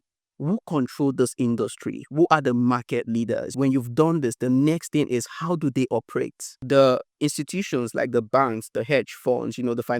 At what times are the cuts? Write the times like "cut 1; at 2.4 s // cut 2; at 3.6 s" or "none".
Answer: cut 1; at 3.5 s // cut 2; at 6.5 s